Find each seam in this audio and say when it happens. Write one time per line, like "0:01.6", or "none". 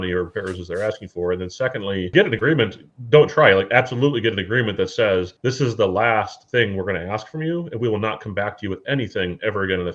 0:02.1
0:05.3